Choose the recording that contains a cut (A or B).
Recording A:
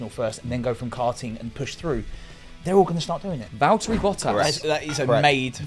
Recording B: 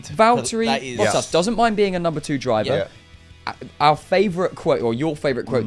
A